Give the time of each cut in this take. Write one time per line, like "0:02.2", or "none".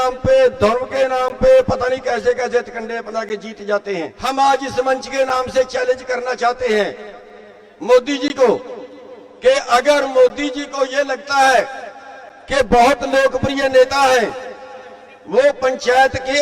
0:04.1